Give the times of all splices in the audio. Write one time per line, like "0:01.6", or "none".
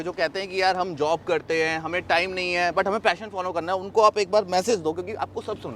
none